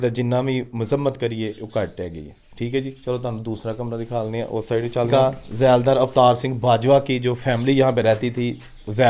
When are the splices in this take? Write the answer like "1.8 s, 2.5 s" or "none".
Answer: 5.1 s